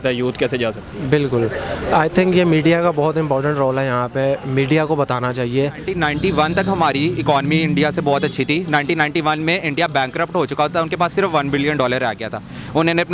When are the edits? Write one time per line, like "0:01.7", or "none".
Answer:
0:05.9